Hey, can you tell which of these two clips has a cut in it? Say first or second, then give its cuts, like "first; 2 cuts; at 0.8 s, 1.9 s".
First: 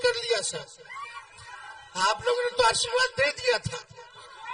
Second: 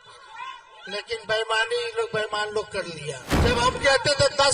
second; 1 cut; at 3.3 s